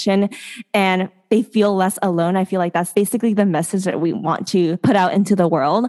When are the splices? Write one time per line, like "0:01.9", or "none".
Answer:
0:02.9
0:04.8